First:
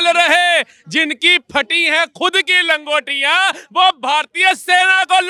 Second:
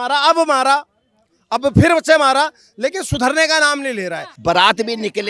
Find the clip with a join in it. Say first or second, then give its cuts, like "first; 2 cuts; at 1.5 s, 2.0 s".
second; 1 cut; at 4.3 s